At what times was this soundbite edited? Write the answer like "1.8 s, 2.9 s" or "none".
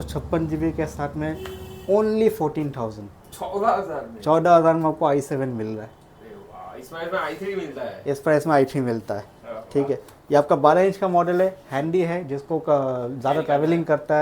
none